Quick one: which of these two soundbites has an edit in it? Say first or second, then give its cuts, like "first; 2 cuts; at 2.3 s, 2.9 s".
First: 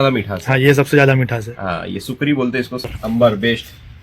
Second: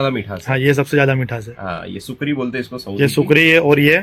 first; 1 cut; at 2.9 s